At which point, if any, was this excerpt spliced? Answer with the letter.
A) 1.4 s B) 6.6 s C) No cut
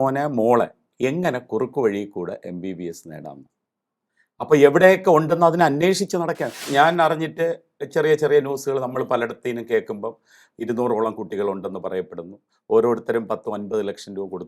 B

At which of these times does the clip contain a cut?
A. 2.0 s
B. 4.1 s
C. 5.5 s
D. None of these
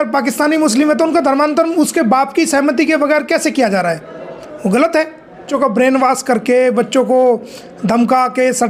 C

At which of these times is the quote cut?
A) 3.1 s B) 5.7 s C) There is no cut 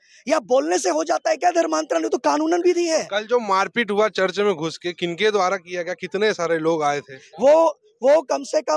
C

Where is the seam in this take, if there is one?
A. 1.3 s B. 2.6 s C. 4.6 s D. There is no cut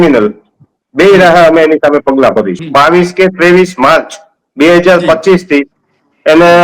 B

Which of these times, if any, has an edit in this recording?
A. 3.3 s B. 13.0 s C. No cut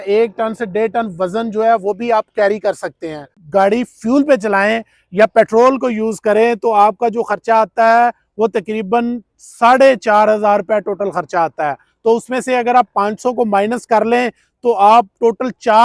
A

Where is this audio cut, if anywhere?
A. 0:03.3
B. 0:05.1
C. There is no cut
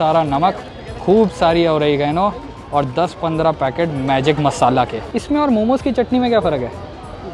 B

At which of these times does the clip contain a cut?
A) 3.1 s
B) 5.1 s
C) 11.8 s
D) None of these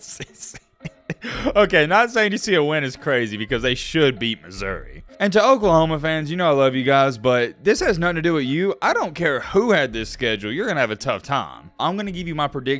C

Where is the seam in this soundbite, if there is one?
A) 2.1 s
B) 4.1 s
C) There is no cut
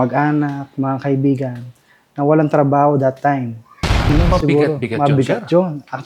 B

